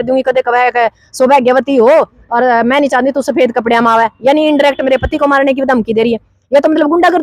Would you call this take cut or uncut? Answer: uncut